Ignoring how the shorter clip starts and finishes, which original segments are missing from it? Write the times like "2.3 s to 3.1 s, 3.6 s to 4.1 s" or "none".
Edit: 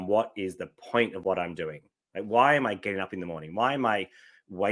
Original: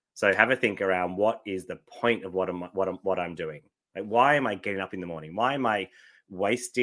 2.3 s to 3.0 s